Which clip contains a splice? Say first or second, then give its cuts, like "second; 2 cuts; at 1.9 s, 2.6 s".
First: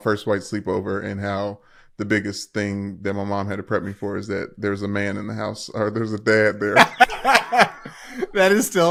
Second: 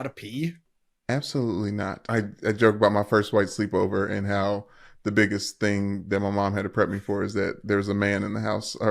second; 1 cut; at 2.0 s